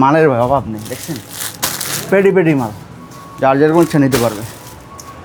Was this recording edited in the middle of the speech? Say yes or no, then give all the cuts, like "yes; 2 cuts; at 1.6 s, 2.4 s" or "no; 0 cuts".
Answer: no; 0 cuts